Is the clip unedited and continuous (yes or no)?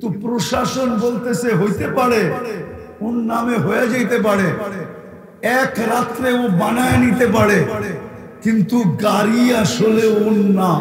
yes